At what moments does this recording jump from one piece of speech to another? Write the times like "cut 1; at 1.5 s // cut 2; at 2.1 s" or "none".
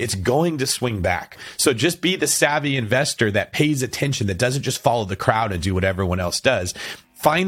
cut 1; at 1.4 s